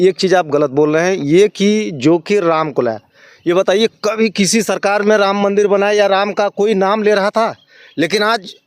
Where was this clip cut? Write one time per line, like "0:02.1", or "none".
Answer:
none